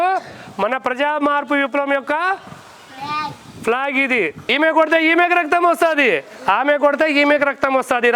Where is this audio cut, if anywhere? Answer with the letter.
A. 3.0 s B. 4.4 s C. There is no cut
B